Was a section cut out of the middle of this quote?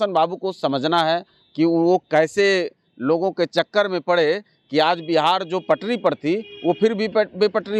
no; 0 cuts

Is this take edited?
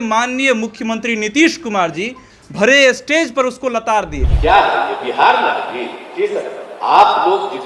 yes; 1 cut; at 4.2 s

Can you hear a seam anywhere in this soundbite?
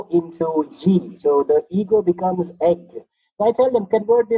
no; 0 cuts

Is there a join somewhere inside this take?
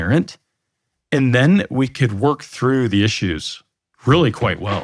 no; 0 cuts

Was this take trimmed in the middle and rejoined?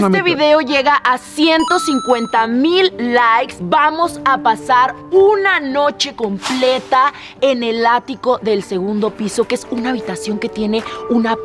no; 0 cuts

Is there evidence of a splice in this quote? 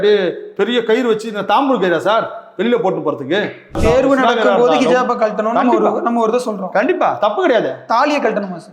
yes; 1 cut; at 3.8 s

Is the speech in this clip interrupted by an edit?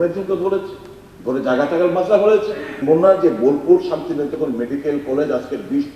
yes; 1 cut; at 2.7 s

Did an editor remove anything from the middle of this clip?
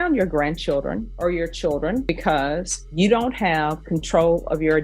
yes; 2 cuts; at 1.1 s, 2.4 s

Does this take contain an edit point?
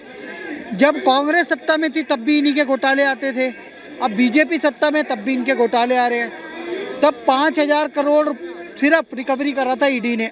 no; 0 cuts

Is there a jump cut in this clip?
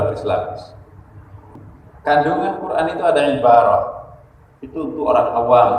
yes; 1 cut; at 1.7 s

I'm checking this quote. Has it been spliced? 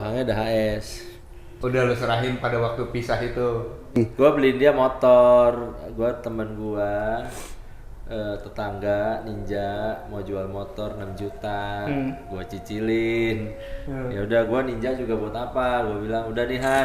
yes; 1 cut; at 3.9 s

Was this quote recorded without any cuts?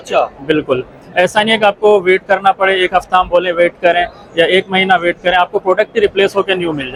yes; 0 cuts

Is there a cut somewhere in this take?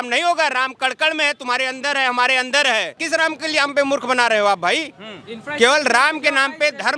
yes; 1 cut; at 3.0 s

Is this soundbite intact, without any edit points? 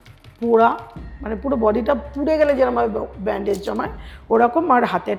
yes; 0 cuts

